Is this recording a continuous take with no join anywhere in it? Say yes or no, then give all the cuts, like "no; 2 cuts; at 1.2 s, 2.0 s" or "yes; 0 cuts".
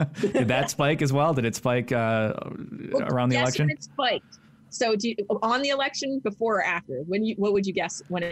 yes; 0 cuts